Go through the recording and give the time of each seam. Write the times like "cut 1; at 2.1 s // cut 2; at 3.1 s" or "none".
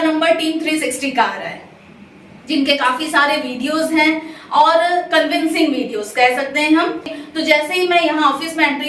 cut 1; at 7.1 s